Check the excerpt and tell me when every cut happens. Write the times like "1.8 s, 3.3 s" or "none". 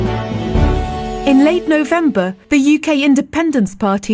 1.2 s